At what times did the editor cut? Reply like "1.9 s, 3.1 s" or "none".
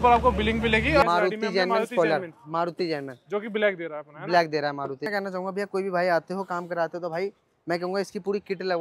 1.0 s, 5.0 s